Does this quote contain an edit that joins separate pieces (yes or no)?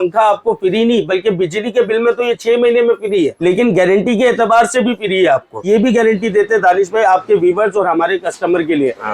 yes